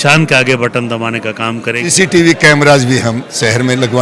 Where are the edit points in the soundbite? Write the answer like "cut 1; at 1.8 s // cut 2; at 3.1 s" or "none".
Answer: cut 1; at 1.9 s